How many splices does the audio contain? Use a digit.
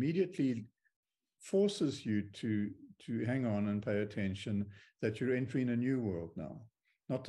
0